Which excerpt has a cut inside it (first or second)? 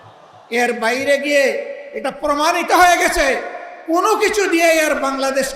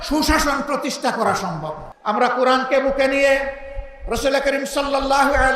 second